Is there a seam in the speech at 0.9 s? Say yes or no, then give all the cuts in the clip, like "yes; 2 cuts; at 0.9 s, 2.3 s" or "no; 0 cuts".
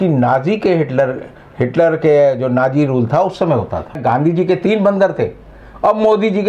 no; 1 cut; at 4.0 s